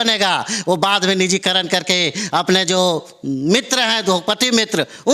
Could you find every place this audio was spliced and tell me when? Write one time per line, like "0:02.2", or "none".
none